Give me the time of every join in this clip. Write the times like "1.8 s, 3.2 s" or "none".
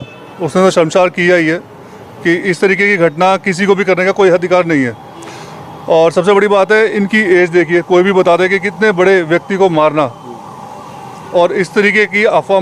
none